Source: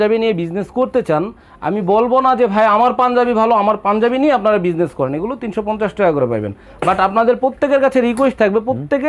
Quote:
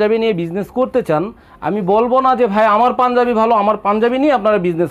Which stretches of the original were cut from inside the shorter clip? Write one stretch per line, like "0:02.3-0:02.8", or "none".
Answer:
none